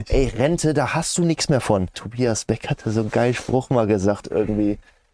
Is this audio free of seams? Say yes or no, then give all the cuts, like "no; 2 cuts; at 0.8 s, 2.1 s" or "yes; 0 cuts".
no; 1 cut; at 2.0 s